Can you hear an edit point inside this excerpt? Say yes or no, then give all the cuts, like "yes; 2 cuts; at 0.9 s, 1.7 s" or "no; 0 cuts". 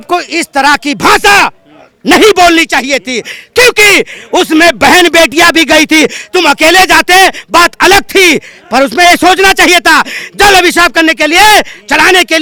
no; 0 cuts